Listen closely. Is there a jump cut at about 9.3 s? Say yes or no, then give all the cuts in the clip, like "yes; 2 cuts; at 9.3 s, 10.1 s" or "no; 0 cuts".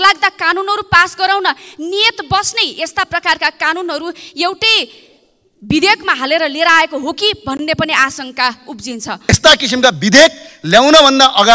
yes; 1 cut; at 9.3 s